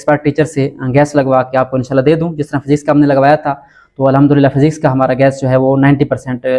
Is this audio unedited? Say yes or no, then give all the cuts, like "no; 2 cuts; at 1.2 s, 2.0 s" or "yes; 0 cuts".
yes; 0 cuts